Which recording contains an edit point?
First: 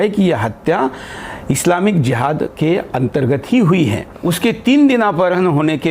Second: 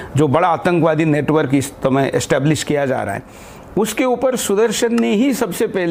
first; 1 cut; at 4.1 s

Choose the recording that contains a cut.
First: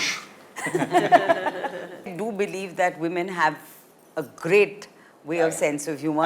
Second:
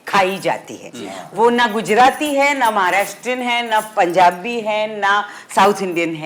first; 1 cut; at 2.0 s

